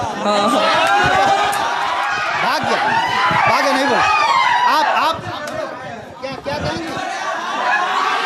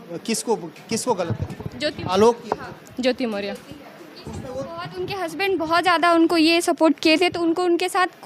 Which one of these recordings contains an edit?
first; 1 cut; at 2.0 s

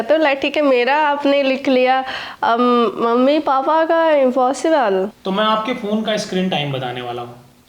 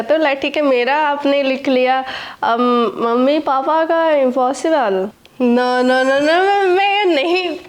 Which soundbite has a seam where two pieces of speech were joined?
second; 1 cut; at 5.2 s

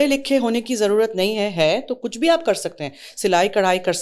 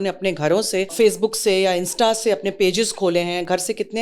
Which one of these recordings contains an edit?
second; 1 cut; at 0.9 s

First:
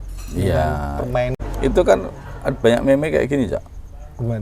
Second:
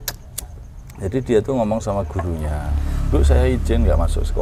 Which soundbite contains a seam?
first; 1 cut; at 1.4 s

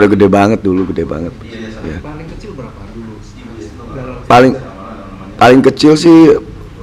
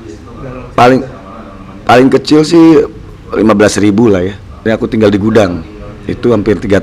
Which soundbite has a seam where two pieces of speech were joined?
second; 1 cut; at 4.6 s

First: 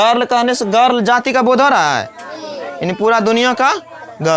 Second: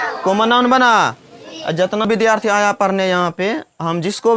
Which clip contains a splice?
second; 1 cut; at 2.0 s

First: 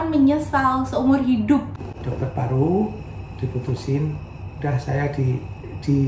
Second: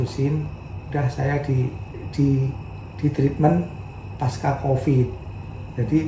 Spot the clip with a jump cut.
first; 1 cut; at 1.8 s

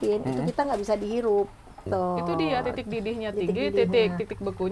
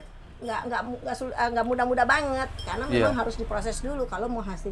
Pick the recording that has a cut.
first; 1 cut; at 1.8 s

